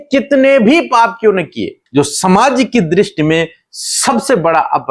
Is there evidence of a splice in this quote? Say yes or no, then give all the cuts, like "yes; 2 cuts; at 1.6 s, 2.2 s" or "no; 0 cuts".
yes; 1 cut; at 1.8 s